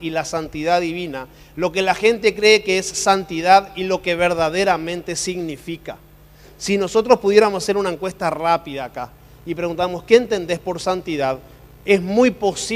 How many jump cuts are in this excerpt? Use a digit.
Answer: 1